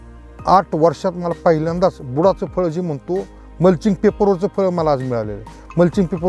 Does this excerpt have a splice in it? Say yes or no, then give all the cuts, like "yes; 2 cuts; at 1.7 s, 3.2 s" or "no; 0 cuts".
no; 0 cuts